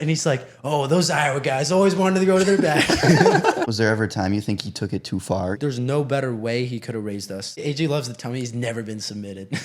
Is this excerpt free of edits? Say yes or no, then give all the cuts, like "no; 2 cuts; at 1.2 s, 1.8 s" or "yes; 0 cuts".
no; 3 cuts; at 3.6 s, 5.5 s, 7.6 s